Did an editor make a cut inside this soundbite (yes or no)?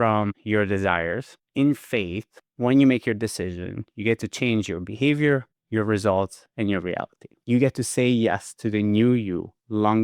yes